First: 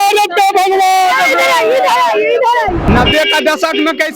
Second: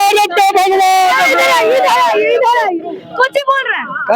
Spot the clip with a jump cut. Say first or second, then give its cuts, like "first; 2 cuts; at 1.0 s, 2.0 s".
first; 1 cut; at 2.8 s